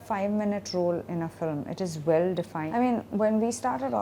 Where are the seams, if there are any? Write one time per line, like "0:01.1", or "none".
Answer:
0:02.6